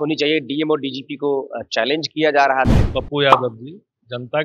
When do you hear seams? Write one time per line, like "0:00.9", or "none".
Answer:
0:02.7